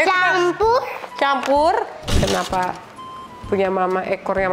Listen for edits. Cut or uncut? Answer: cut